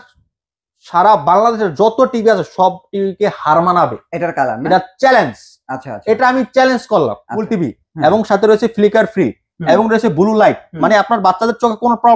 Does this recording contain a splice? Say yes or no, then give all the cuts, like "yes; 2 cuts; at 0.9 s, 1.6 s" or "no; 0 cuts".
yes; 1 cut; at 7.4 s